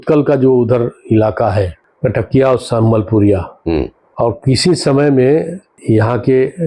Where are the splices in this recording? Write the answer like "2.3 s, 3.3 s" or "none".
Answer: 1.8 s, 4.0 s, 5.8 s